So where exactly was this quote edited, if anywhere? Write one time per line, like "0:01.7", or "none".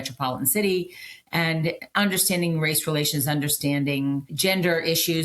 0:04.3